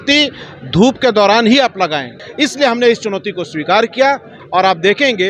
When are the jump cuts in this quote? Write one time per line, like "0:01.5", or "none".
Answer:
0:02.2
0:04.3